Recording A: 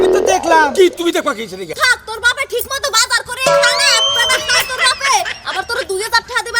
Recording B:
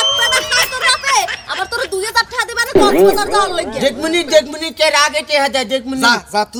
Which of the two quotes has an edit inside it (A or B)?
A